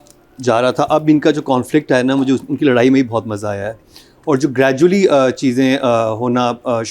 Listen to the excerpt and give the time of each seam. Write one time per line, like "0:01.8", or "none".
none